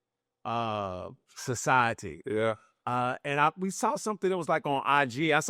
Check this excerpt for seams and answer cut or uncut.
uncut